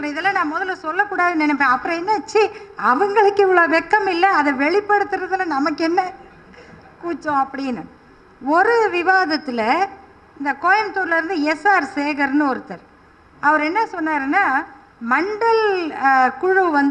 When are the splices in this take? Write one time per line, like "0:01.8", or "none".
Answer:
none